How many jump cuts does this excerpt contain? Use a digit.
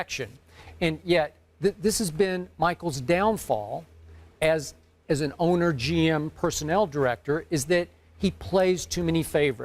1